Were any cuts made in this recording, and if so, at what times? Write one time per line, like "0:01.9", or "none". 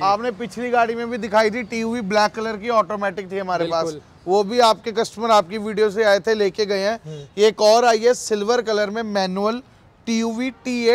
none